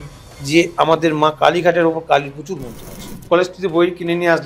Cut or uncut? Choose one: cut